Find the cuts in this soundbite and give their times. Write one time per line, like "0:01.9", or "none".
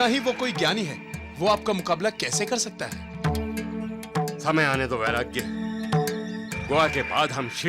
none